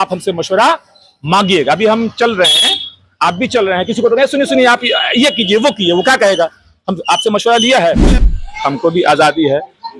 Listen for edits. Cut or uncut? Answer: cut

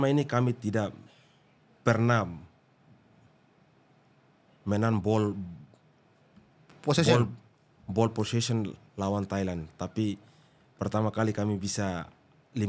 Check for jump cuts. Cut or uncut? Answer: uncut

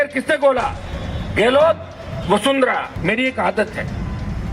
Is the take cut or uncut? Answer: cut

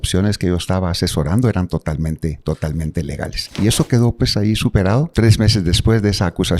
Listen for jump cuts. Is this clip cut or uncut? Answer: cut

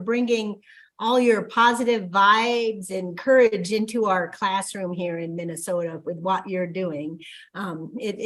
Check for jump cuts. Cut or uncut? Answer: uncut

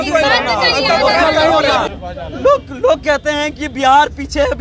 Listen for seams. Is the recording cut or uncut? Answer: cut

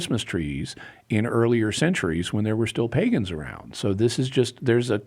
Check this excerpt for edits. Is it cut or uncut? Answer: uncut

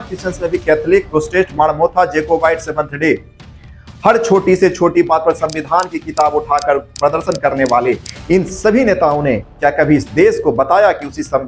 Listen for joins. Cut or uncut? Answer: cut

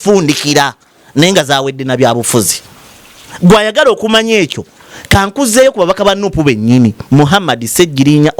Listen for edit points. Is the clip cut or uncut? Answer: uncut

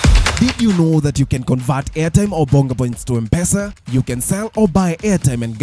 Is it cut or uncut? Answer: cut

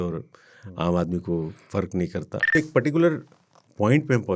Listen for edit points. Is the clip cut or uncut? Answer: cut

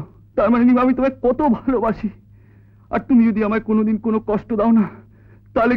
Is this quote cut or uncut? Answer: uncut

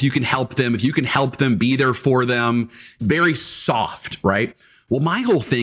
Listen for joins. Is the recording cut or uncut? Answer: cut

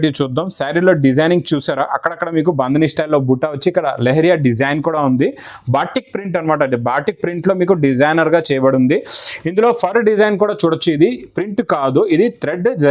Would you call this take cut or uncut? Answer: uncut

